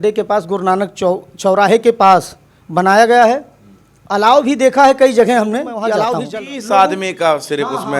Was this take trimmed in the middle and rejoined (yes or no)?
yes